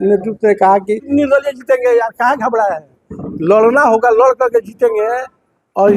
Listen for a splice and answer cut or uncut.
cut